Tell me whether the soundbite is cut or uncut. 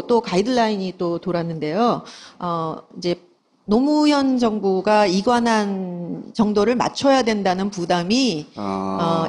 uncut